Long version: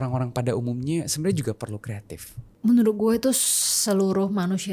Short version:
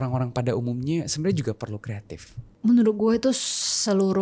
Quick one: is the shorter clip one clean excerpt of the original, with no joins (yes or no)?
yes